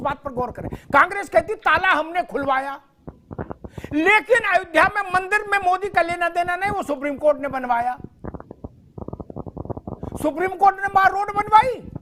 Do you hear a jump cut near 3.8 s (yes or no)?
no